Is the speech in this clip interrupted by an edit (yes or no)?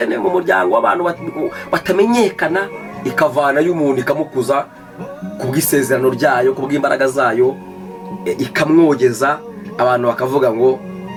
no